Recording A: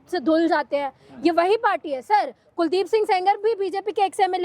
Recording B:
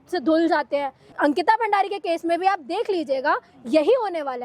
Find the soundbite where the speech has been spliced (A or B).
B